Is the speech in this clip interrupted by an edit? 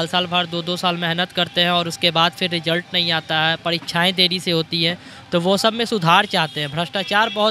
no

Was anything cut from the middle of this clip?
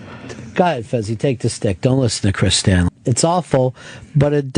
no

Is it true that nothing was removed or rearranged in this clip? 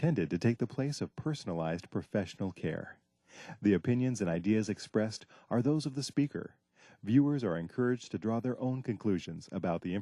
yes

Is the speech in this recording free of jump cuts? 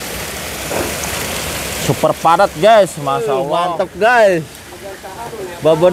no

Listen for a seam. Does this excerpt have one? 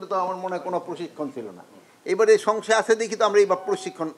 no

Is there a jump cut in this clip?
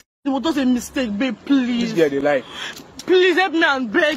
no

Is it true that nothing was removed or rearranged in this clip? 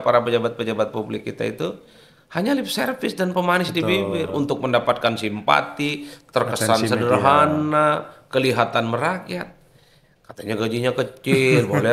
yes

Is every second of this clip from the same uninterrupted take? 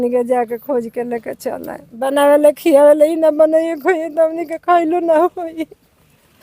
no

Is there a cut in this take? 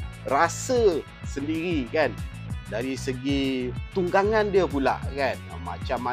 no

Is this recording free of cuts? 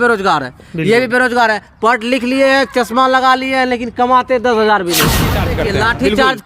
no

